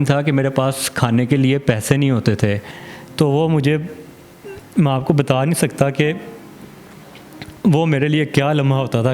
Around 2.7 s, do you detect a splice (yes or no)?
yes